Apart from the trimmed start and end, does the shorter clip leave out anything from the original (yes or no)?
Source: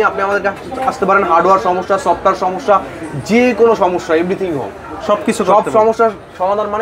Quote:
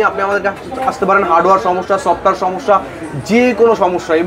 no